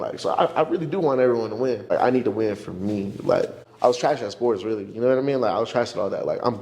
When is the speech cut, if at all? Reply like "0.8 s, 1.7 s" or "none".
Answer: 1.9 s, 3.6 s